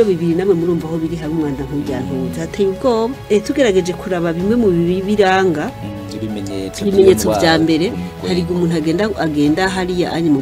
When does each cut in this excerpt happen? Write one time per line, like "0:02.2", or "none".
0:03.2